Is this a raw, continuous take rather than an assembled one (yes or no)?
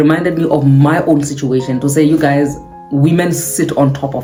yes